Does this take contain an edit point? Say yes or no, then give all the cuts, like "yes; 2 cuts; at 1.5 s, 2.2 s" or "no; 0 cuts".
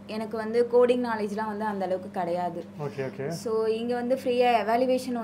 no; 0 cuts